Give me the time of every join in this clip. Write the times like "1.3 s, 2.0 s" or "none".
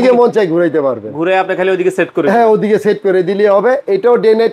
none